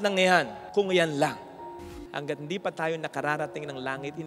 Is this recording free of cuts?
no; 1 cut; at 1.7 s

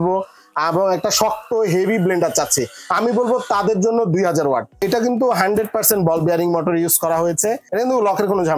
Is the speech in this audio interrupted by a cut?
yes; 2 cuts; at 4.8 s, 7.7 s

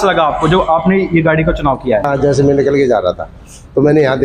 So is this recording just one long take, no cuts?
no; 1 cut; at 2.1 s

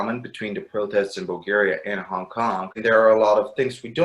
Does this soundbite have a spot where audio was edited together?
no; 0 cuts

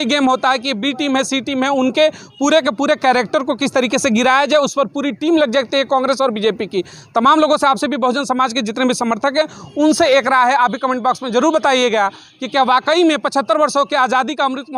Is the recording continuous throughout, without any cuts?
yes; 0 cuts

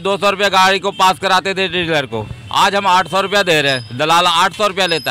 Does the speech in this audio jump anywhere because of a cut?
no; 0 cuts

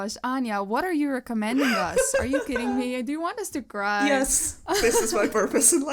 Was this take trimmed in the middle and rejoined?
no; 0 cuts

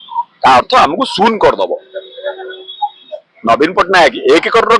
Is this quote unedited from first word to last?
yes; 0 cuts

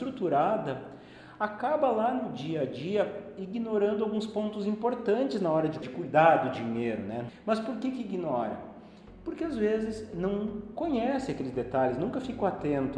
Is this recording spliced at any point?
yes; 2 cuts; at 5.8 s, 7.3 s

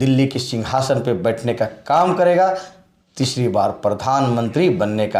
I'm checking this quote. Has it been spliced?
no; 0 cuts

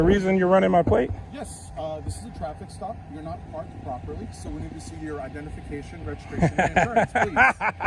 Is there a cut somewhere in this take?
no; 0 cuts

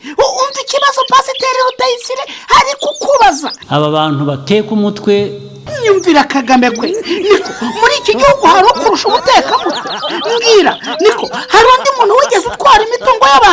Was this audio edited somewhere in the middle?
yes; 2 cuts; at 3.6 s, 5.6 s

